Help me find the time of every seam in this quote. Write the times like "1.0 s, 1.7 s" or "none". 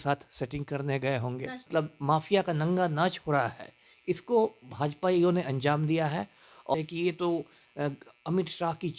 1.6 s, 6.7 s